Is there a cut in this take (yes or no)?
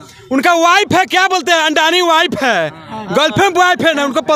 no